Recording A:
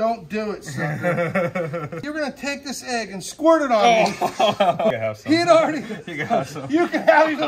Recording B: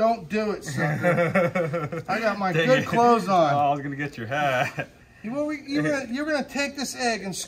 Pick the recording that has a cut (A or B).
A